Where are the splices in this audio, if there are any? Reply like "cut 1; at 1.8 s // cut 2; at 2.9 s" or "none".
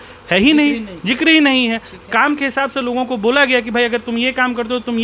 none